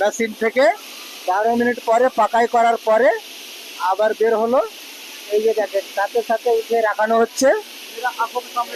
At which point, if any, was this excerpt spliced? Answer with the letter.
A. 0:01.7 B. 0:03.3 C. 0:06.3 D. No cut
D